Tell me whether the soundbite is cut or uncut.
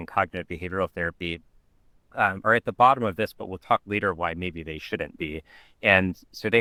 uncut